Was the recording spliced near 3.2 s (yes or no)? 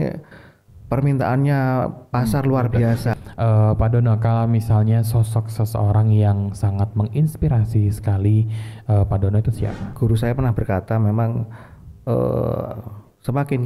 yes